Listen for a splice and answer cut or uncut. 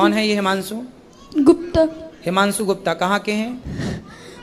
uncut